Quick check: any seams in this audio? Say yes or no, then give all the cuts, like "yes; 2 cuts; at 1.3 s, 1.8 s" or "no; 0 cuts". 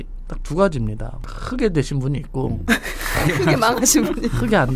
no; 0 cuts